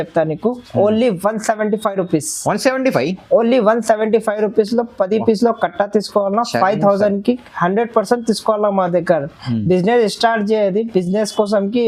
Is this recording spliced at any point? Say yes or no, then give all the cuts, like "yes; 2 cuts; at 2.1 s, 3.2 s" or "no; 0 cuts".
no; 0 cuts